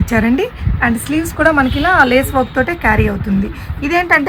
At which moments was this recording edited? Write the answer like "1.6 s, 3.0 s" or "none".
none